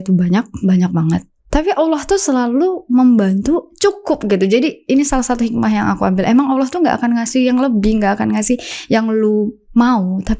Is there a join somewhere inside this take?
no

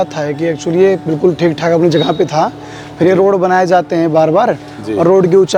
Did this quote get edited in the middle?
no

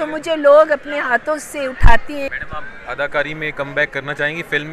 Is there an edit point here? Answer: yes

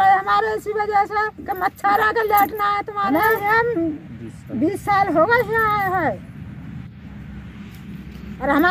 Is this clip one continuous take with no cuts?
no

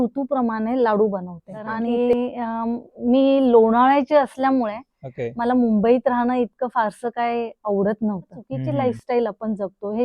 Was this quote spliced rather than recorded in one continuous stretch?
yes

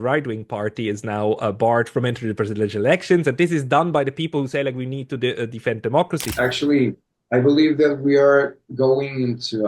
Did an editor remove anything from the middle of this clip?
yes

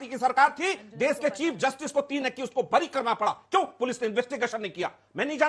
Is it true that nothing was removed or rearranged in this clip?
yes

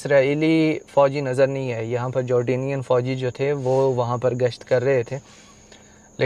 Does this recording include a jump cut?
no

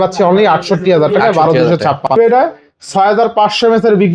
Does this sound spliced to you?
yes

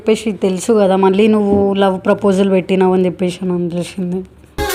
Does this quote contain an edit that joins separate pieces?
no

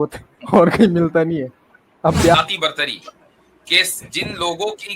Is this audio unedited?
no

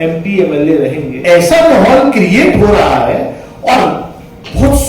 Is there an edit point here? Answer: yes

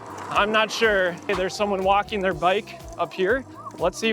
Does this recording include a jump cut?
yes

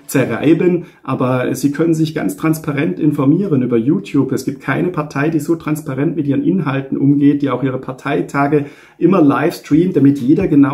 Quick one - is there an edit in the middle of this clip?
no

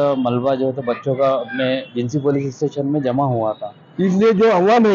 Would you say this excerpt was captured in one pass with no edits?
no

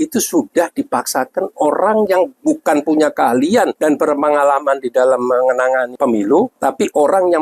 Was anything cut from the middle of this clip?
yes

